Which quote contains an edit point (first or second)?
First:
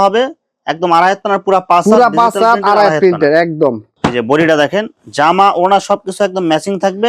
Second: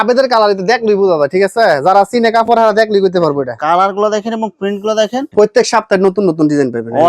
second